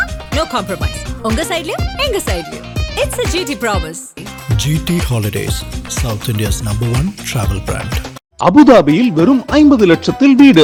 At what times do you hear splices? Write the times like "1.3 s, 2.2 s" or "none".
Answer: none